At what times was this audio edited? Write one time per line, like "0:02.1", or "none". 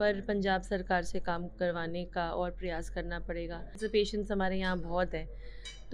0:03.8

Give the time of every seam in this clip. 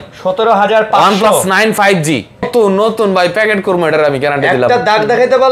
0:02.5

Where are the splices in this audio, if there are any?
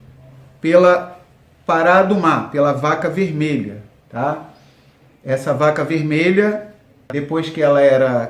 0:07.1

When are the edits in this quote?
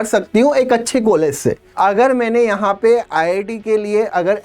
0:01.6

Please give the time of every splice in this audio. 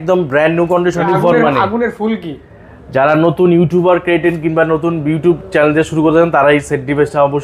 0:01.0

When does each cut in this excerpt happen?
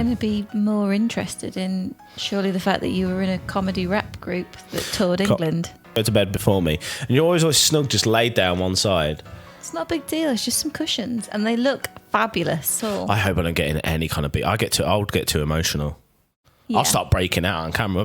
0:06.0
0:12.7

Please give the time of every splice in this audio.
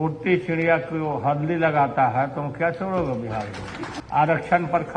0:04.0

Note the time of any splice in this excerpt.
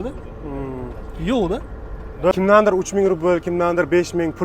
0:02.3

